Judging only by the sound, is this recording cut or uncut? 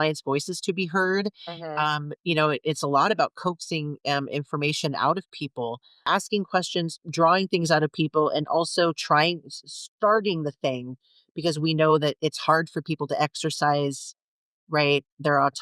cut